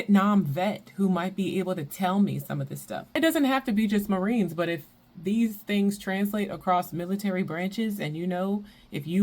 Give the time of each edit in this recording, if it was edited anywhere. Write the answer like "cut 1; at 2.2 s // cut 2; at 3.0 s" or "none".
cut 1; at 3.2 s